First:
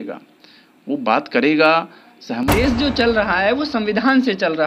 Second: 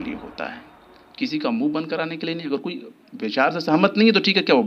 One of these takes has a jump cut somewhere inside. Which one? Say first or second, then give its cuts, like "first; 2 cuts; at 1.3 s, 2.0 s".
first; 1 cut; at 2.5 s